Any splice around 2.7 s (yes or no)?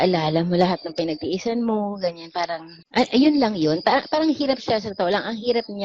yes